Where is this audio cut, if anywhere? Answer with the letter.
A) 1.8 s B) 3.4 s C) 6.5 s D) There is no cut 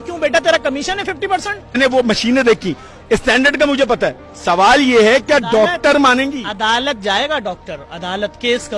A